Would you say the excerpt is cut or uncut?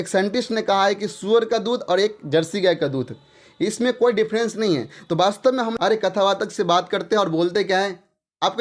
cut